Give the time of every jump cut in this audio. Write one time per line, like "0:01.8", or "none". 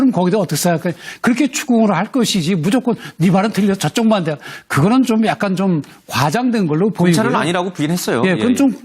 0:03.3